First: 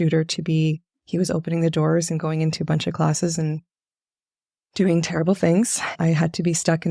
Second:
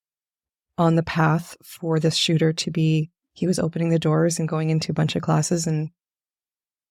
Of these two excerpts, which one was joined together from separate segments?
first; 1 cut; at 5.8 s

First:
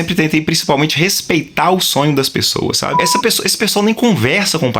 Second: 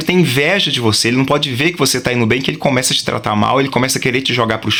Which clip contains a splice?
first; 1 cut; at 3.0 s

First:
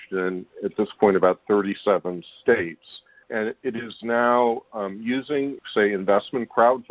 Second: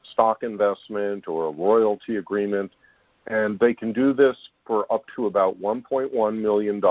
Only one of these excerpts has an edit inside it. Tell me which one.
first; 2 cuts; at 3.3 s, 5.6 s

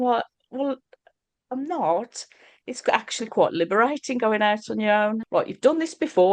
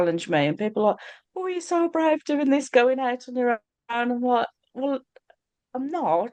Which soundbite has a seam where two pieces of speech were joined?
first; 1 cut; at 5.2 s

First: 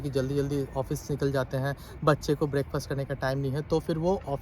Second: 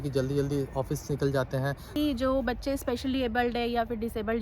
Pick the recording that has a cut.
second; 1 cut; at 2.0 s

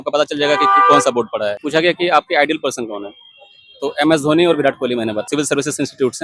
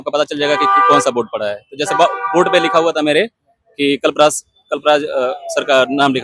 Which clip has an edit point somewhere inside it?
first; 2 cuts; at 1.6 s, 5.3 s

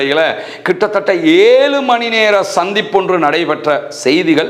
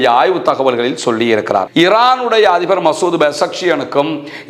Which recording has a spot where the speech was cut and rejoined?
second; 1 cut; at 1.7 s

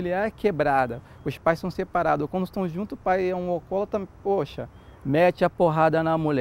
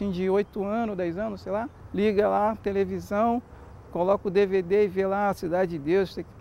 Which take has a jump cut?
second; 1 cut; at 1.8 s

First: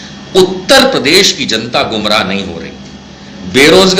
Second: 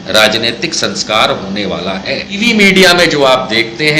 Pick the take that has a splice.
second; 1 cut; at 2.4 s

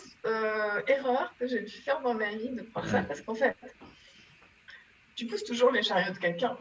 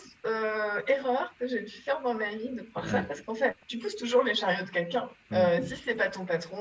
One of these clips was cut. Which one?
second; 2 cuts; at 3.7 s, 5.2 s

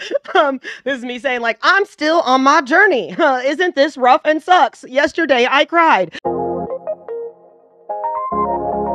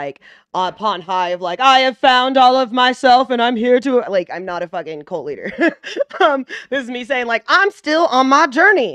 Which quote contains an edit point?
first; 1 cut; at 6.1 s

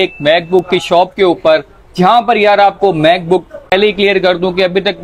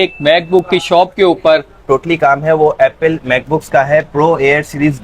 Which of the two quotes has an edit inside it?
second; 1 cut; at 1.8 s

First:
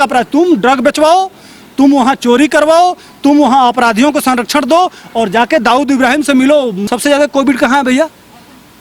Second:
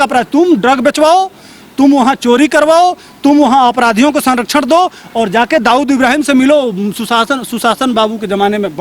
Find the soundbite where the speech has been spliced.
first; 1 cut; at 6.8 s

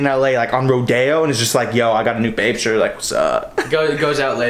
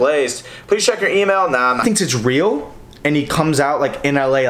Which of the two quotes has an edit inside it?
second; 1 cut; at 1.8 s

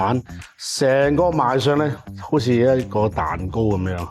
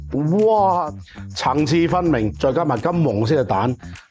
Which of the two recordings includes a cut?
second; 2 cuts; at 0.9 s, 2.4 s

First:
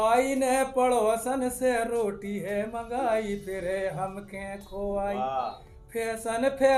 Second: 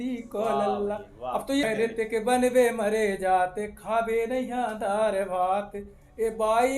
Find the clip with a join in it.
second; 1 cut; at 1.6 s

